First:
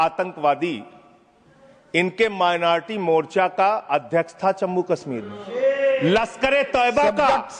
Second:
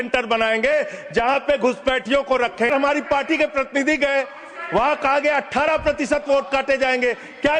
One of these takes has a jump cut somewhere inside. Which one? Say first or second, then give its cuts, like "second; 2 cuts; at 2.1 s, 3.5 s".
second; 1 cut; at 2.7 s